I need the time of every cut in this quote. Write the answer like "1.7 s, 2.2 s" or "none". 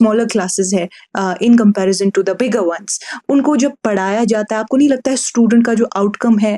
none